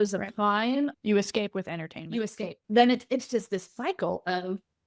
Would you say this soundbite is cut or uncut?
cut